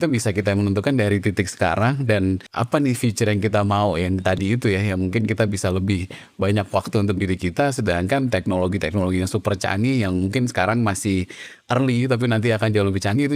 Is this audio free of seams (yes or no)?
no